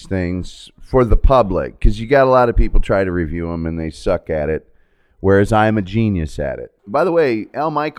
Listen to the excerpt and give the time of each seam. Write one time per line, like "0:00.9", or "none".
0:06.7